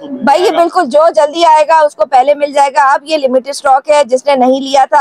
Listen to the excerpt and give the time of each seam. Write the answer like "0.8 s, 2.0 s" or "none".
none